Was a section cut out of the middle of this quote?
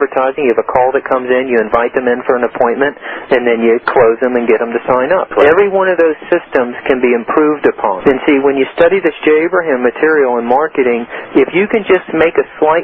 yes; 3 cuts; at 3.9 s, 5.3 s, 8.0 s

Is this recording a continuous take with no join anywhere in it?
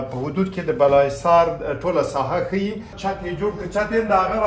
no; 1 cut; at 2.9 s

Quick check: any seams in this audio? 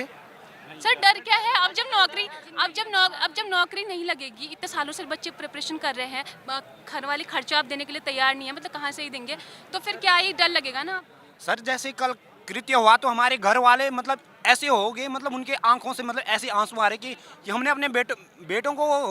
no; 0 cuts

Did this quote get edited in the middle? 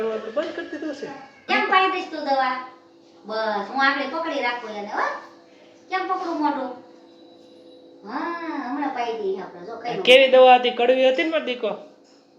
yes; 1 cut; at 1.5 s

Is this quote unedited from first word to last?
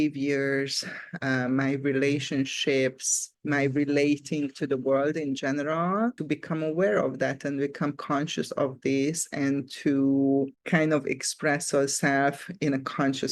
yes; 0 cuts

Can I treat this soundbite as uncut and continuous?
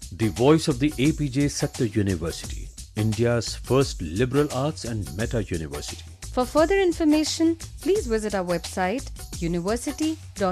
yes; 0 cuts

